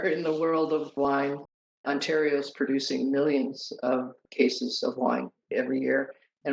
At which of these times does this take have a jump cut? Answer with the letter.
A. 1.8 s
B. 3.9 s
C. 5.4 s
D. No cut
A